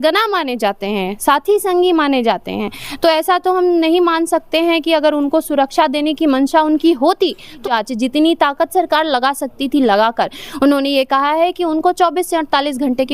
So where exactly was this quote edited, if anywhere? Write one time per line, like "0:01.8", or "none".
0:07.6